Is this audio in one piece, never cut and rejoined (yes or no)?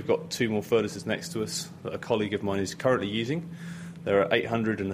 yes